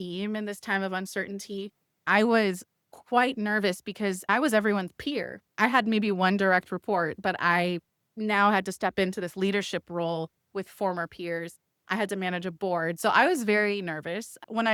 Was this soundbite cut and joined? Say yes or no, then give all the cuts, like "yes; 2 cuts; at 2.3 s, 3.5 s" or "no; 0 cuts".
no; 0 cuts